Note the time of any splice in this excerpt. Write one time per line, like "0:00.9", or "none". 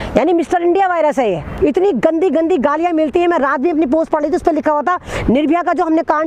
0:01.5

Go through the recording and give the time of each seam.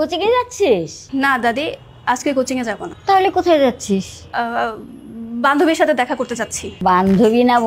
0:01.0
0:02.9
0:04.2
0:06.6

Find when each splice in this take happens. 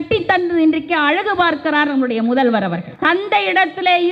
0:02.9

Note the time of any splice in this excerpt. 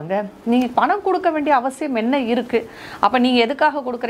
none

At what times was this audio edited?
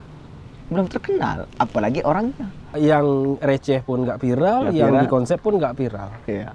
0:02.7

